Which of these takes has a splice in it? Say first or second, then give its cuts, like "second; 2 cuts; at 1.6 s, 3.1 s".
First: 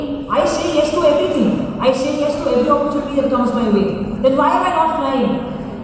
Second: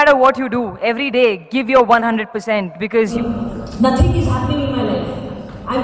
second; 1 cut; at 3.1 s